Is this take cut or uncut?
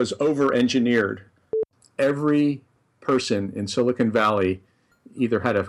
cut